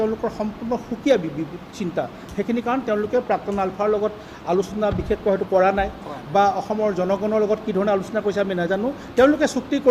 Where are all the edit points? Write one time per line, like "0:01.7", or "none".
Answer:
none